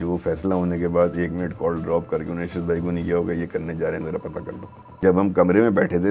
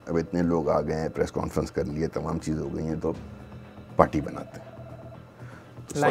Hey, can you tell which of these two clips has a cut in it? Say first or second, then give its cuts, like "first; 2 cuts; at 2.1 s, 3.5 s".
first; 1 cut; at 4.9 s